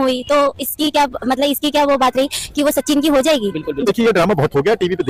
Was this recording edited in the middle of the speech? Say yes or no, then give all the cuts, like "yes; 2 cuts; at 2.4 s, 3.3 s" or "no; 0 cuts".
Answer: yes; 1 cut; at 3.8 s